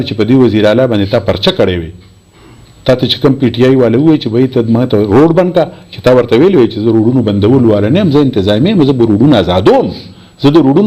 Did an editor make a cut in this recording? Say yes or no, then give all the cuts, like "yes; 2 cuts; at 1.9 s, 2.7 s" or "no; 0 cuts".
no; 0 cuts